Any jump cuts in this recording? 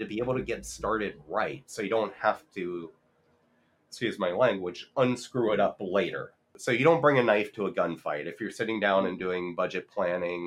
yes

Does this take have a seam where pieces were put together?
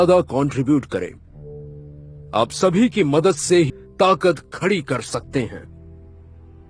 yes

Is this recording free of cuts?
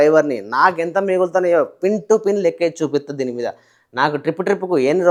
yes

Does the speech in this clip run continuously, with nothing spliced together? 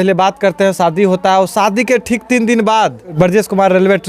no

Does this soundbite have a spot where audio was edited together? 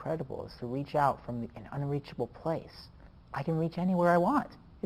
no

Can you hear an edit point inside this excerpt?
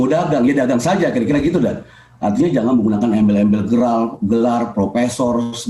no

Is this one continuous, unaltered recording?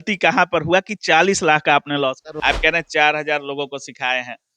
no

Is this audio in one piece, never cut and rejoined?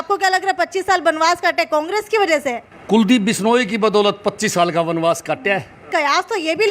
no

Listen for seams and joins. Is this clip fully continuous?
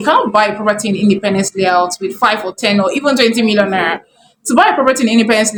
yes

